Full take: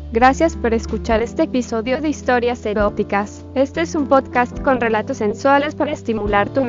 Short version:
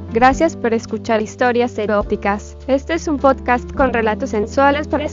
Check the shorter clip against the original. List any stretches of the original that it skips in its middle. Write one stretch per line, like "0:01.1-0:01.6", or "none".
0:01.3-0:02.2

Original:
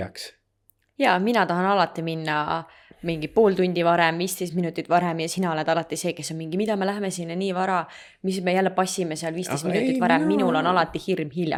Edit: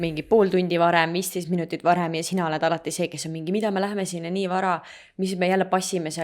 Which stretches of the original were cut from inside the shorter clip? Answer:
none

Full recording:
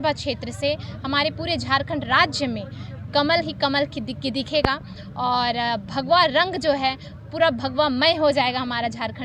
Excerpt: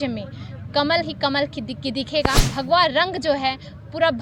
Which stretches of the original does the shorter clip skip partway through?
0:04.9-0:05.9

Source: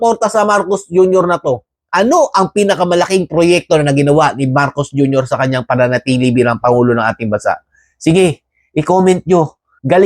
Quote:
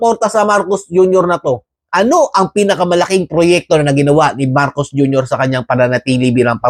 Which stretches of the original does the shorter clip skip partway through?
none

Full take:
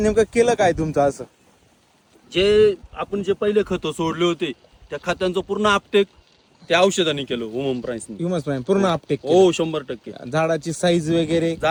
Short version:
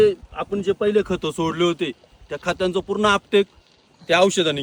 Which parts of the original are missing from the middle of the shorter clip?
none

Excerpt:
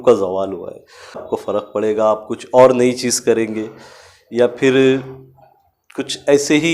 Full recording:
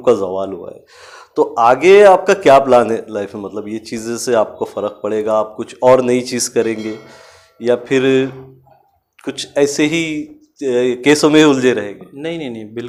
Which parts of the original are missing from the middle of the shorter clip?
0:01.2-0:04.5

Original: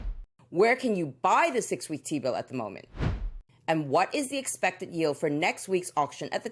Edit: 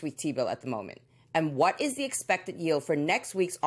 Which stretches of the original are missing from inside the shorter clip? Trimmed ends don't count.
0:02.8-0:03.3

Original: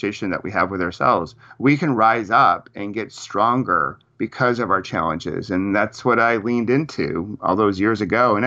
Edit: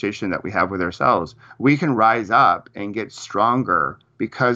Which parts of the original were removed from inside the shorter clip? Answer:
none

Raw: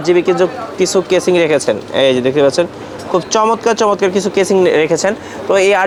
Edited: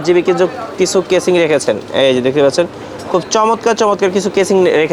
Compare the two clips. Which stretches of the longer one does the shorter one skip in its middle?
none

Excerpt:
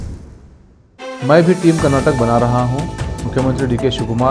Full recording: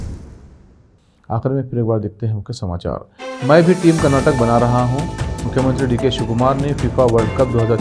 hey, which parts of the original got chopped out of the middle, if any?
0:00.9-0:03.1

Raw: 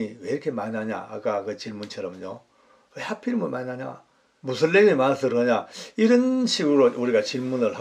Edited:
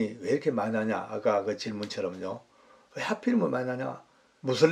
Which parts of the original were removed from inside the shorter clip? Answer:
none

